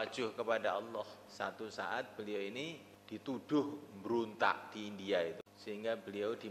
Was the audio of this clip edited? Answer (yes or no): yes